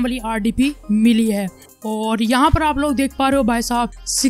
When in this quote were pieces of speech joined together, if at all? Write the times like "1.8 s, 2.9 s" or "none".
1.7 s